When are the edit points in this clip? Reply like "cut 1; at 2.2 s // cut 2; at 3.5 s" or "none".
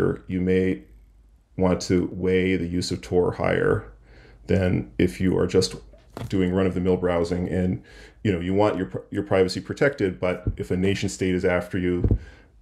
none